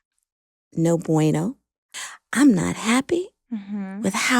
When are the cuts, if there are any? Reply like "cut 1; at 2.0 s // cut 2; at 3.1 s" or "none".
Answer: cut 1; at 2.0 s